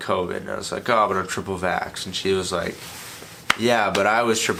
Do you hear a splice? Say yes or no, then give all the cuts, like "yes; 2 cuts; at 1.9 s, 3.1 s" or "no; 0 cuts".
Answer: no; 0 cuts